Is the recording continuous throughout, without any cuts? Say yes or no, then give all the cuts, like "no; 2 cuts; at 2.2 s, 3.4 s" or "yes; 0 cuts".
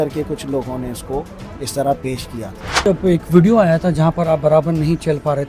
no; 1 cut; at 2.9 s